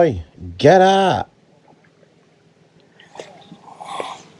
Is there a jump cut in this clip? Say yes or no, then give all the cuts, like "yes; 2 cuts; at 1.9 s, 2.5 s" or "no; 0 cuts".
yes; 1 cut; at 1.4 s